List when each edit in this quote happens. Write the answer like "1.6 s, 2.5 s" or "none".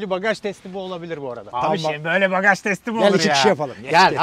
1.5 s